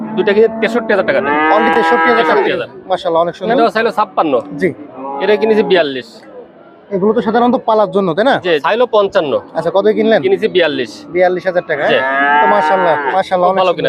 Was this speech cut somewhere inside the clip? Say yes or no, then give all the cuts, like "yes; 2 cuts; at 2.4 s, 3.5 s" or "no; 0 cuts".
yes; 2 cuts; at 3.5 s, 8.6 s